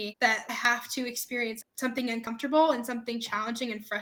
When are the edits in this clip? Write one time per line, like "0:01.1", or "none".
none